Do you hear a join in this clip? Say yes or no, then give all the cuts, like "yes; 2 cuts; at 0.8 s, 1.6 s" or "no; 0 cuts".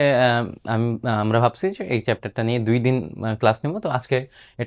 no; 0 cuts